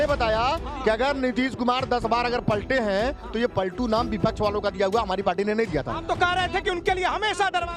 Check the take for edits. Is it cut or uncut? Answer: uncut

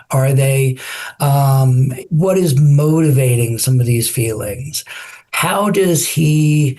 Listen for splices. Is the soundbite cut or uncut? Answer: cut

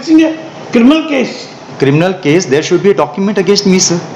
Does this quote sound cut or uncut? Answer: uncut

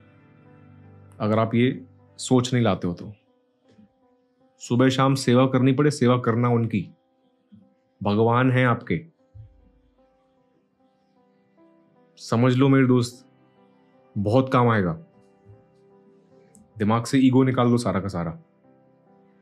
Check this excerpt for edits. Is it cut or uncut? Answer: cut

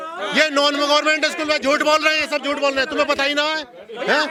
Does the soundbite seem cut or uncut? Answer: uncut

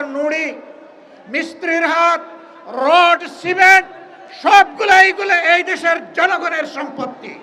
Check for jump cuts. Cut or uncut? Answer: uncut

